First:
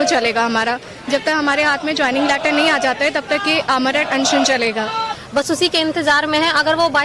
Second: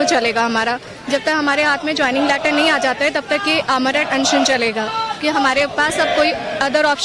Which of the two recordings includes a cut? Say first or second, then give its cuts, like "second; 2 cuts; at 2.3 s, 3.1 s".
first; 1 cut; at 5.1 s